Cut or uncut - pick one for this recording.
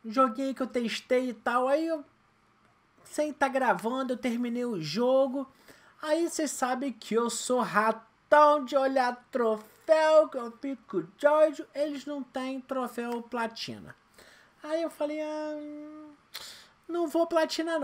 cut